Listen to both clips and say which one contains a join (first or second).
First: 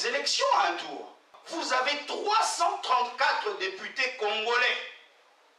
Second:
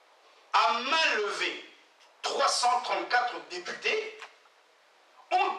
first